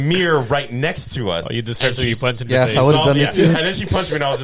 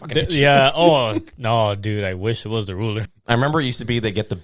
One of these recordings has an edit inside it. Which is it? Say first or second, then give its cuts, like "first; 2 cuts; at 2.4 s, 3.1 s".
second; 1 cut; at 3.1 s